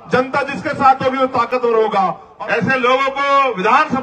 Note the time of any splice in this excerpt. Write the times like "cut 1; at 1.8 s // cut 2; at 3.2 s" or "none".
cut 1; at 2.2 s